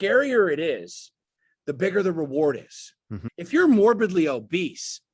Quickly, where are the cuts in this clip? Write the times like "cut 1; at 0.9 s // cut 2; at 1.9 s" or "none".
cut 1; at 3.2 s